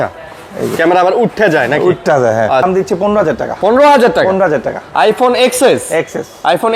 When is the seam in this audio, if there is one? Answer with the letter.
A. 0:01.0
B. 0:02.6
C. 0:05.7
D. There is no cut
B